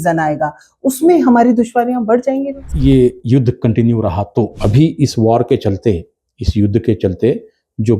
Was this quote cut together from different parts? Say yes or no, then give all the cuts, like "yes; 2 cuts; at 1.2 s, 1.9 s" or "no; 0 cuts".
yes; 2 cuts; at 2.6 s, 4.6 s